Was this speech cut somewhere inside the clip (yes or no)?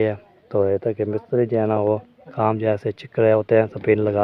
no